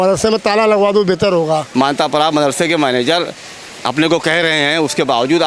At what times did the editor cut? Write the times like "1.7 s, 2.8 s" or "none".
1.7 s

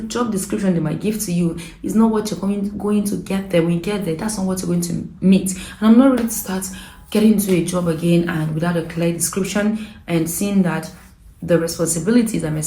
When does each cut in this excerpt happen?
none

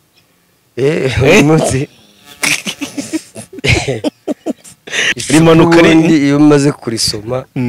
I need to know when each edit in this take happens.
5.0 s

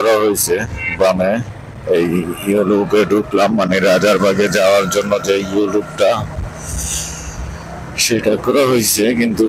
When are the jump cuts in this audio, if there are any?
none

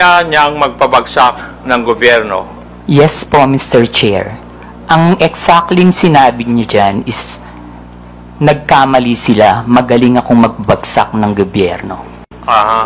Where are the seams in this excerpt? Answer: 2.7 s

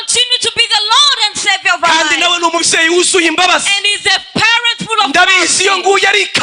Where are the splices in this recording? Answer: none

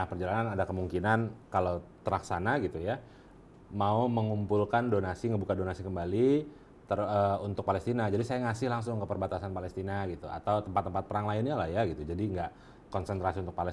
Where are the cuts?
1.4 s

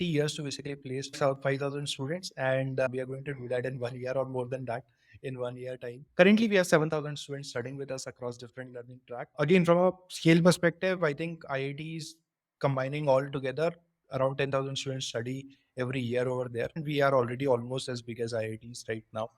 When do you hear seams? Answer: 16.8 s

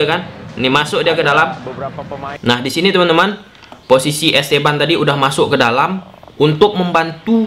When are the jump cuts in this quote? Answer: 2.4 s

